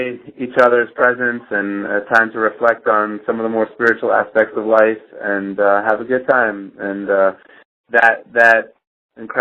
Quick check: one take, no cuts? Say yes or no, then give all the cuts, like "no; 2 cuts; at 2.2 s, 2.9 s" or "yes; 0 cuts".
no; 1 cut; at 4.9 s